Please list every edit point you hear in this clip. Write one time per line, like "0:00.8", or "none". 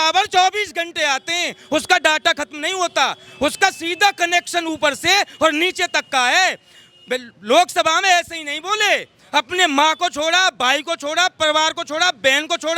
none